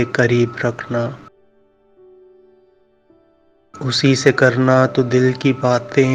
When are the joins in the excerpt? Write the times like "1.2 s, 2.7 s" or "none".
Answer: none